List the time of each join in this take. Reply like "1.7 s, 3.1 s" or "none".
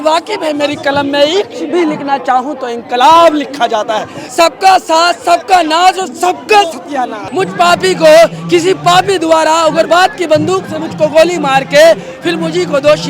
4.2 s, 7.2 s